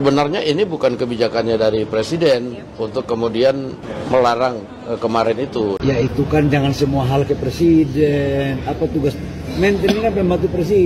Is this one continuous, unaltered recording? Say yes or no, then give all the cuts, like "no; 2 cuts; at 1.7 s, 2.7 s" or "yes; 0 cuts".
yes; 0 cuts